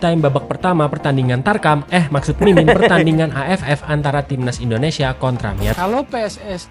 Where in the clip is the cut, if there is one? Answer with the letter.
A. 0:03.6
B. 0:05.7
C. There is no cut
B